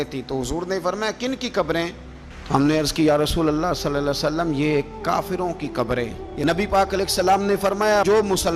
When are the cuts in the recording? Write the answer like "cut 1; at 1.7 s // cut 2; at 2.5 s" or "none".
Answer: cut 1; at 6.2 s